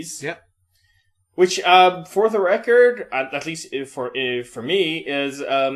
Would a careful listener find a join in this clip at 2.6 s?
yes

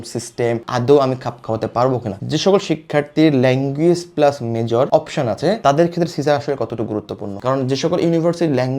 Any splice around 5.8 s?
no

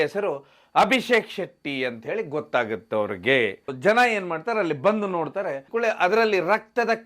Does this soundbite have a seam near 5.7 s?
yes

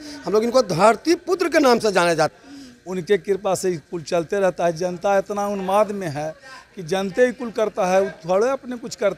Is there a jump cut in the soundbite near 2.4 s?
yes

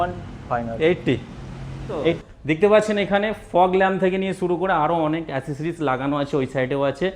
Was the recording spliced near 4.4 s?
no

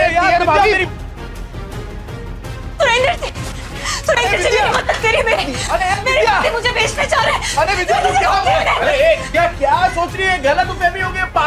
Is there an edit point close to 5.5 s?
no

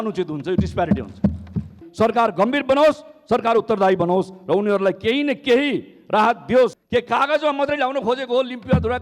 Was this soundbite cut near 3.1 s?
no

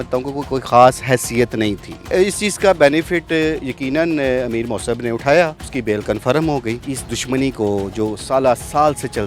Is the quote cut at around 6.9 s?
yes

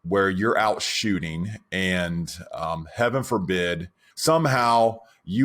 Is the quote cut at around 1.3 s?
no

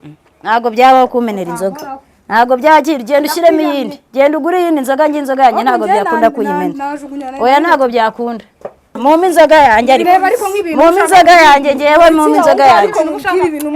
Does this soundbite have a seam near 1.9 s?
no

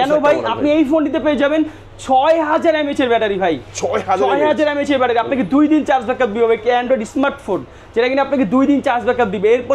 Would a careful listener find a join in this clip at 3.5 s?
no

